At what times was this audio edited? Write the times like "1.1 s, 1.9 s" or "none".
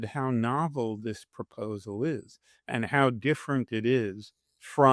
none